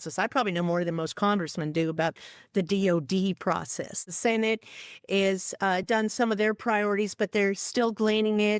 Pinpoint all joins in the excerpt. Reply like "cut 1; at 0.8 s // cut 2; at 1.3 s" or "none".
cut 1; at 4.0 s